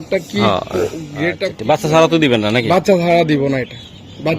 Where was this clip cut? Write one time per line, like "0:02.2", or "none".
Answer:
0:01.5